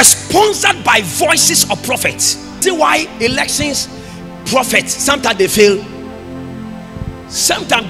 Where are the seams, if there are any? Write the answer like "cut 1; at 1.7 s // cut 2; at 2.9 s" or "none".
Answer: cut 1; at 2.6 s